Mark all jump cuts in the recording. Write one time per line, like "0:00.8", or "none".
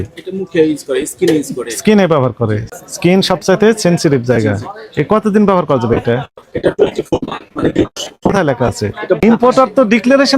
0:02.7
0:09.2